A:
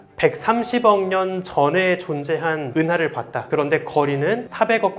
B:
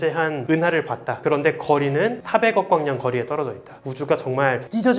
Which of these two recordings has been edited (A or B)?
B